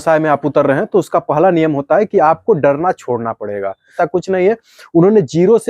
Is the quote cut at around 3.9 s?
yes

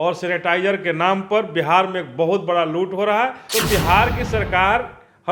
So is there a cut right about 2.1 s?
no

